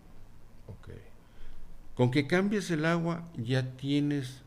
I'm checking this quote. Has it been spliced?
no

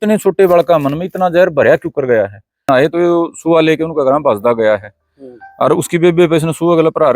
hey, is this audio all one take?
no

